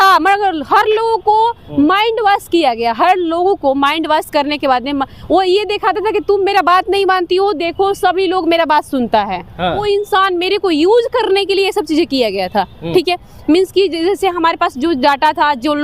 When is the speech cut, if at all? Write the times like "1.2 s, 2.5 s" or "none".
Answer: 9.8 s